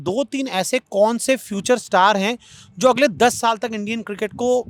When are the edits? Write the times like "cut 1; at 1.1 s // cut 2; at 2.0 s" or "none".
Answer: none